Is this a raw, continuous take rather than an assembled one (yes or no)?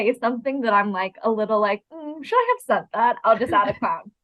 yes